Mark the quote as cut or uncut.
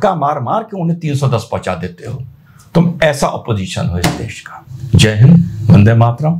uncut